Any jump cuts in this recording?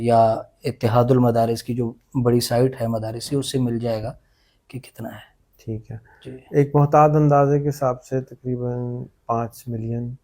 no; 0 cuts

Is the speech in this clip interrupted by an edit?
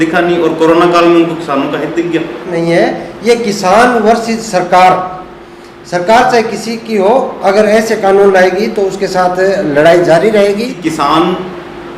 yes; 2 cuts; at 2.5 s, 10.8 s

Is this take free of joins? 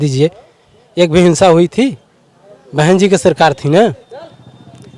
yes; 0 cuts

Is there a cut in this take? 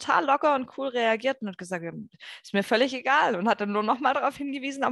no; 0 cuts

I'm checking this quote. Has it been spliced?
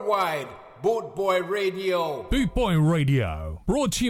yes; 1 cut; at 2.2 s

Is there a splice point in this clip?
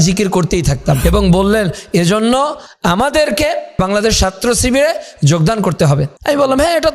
yes; 3 cuts; at 1.0 s, 3.8 s, 6.1 s

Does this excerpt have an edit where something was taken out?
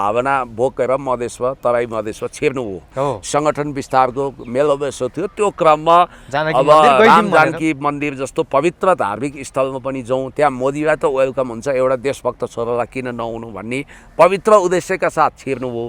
no; 0 cuts

